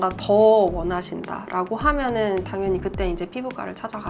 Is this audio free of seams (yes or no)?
yes